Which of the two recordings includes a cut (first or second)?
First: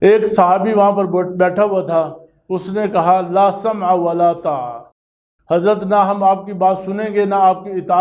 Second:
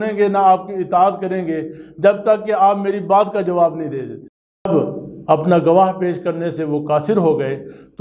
second